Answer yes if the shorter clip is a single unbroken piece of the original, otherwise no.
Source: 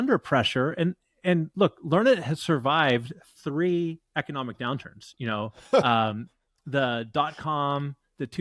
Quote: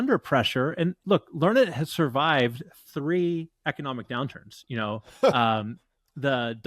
no